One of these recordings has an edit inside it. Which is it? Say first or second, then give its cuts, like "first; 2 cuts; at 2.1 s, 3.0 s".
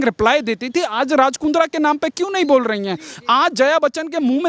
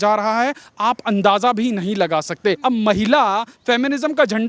second; 1 cut; at 2.6 s